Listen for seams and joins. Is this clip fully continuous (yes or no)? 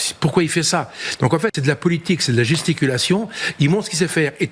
yes